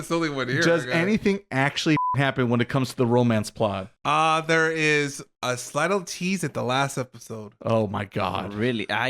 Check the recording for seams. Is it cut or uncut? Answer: cut